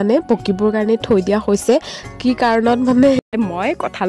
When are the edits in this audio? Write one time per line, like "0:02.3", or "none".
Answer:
0:03.2